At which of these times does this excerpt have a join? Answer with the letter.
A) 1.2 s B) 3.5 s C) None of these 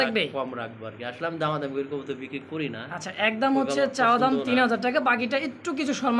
C